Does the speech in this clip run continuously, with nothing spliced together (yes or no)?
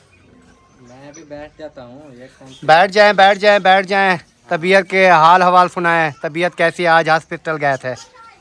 yes